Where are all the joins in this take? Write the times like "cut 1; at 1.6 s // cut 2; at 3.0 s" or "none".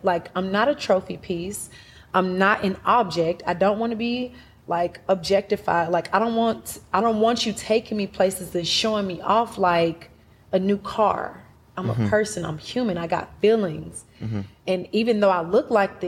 none